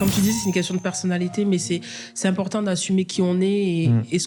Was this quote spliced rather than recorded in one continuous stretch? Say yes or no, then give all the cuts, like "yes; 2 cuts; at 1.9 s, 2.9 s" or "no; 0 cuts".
no; 0 cuts